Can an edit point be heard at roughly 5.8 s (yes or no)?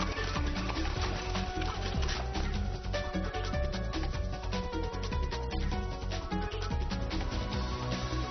yes